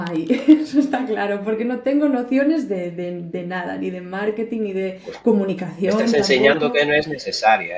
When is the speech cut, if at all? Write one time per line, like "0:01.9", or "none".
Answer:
none